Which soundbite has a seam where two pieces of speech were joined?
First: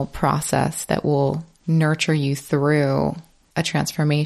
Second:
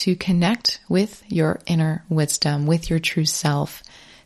first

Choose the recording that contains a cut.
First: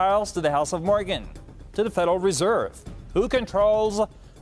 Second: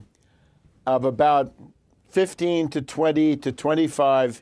first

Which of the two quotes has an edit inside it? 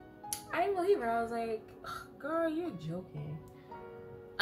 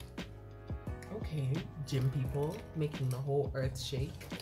second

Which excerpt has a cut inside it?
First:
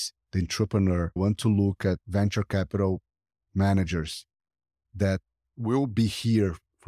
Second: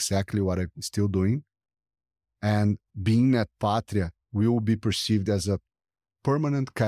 first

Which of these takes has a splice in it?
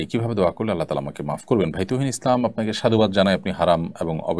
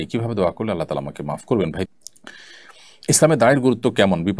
second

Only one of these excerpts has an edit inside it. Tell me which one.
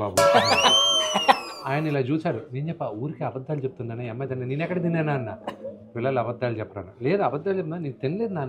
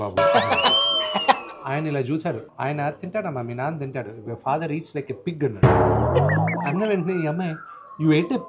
second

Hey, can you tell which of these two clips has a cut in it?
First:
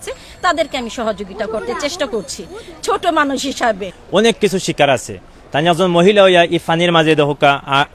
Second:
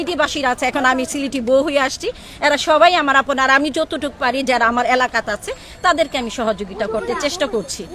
first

